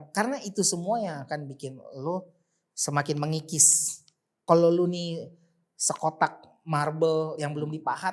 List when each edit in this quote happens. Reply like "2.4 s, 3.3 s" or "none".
4.4 s